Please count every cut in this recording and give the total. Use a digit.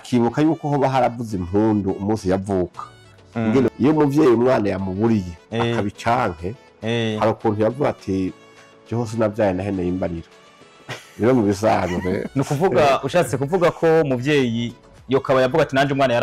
2